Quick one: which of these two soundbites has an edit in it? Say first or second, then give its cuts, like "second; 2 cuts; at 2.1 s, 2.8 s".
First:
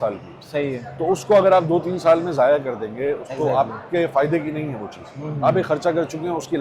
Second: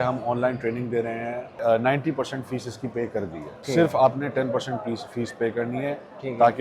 second; 2 cuts; at 1.5 s, 3.6 s